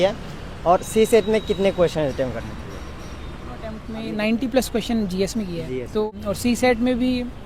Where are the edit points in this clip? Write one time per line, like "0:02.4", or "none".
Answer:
0:03.9
0:06.1